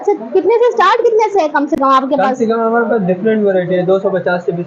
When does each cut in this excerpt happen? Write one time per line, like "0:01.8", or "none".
none